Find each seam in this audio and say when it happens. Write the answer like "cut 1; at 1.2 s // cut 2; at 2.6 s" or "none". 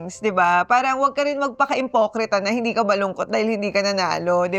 none